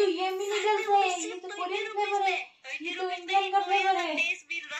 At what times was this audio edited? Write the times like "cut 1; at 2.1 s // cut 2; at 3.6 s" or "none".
none